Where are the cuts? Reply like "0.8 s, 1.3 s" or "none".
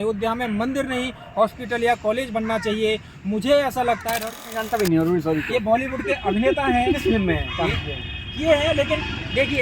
4.5 s